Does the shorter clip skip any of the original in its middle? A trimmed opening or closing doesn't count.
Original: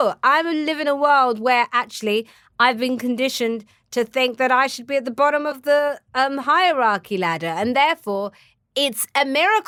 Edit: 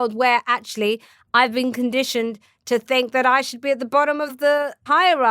yes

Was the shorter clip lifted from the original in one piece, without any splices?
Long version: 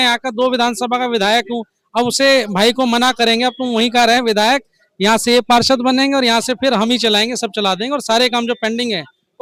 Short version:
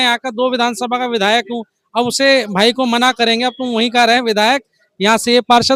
yes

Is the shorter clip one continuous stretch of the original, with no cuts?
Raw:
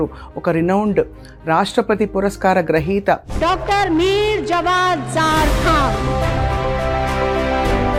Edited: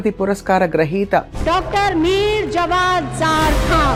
yes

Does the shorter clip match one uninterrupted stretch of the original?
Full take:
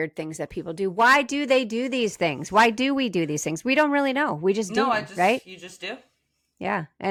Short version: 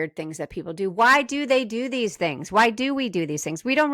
yes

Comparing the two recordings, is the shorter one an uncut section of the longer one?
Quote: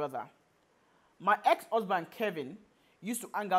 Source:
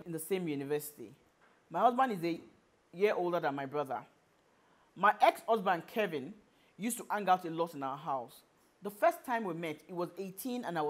yes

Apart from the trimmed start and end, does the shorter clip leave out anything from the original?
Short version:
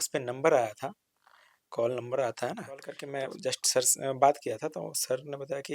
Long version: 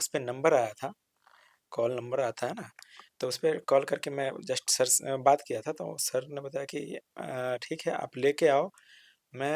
yes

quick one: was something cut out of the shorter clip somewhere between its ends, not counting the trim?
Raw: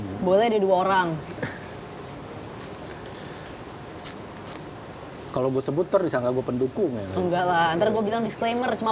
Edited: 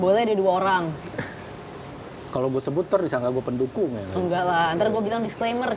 yes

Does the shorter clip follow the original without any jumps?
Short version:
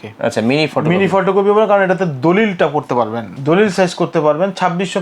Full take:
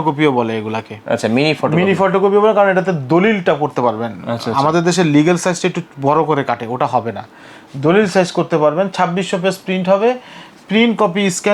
no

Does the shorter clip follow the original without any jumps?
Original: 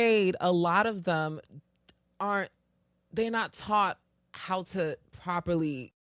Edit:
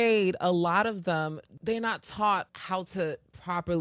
no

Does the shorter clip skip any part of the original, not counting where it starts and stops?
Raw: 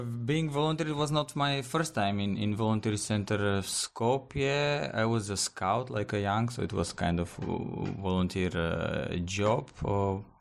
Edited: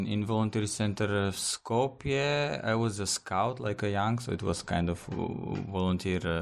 no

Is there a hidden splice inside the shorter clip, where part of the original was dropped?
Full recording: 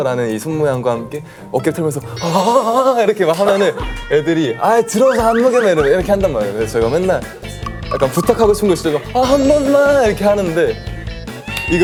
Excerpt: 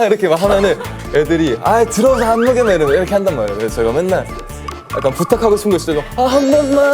no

